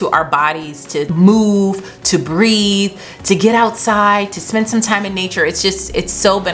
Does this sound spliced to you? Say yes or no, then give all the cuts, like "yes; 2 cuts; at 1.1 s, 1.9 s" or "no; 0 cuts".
yes; 1 cut; at 1.1 s